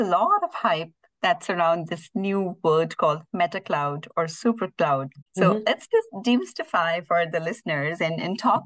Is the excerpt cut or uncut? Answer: cut